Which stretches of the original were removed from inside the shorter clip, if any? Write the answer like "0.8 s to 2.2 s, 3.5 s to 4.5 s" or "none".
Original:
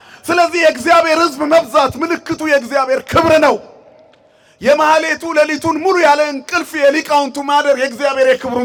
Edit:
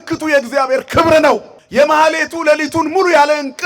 3.7 s to 4.5 s